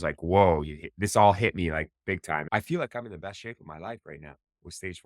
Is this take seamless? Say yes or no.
no